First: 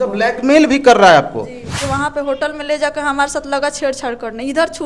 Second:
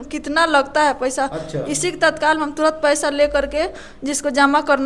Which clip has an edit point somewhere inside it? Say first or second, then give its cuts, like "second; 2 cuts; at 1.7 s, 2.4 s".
first; 1 cut; at 1.7 s